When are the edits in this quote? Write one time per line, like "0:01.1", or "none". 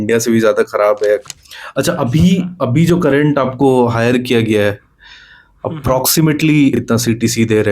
0:01.2
0:06.8